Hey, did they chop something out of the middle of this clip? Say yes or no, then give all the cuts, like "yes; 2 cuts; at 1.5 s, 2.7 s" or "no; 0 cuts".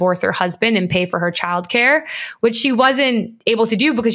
no; 0 cuts